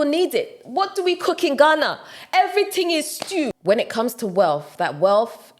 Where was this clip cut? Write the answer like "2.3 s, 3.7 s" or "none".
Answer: 3.6 s